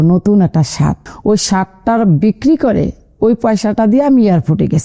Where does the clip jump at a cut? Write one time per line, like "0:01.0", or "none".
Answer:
0:01.1